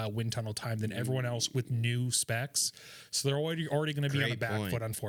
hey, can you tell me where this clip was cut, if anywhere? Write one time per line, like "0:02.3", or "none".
none